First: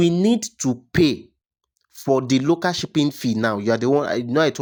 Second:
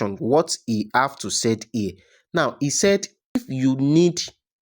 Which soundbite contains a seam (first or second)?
second